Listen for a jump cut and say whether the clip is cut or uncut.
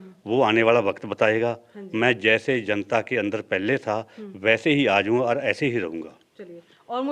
uncut